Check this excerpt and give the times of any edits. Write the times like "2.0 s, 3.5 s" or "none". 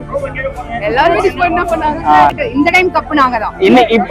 2.4 s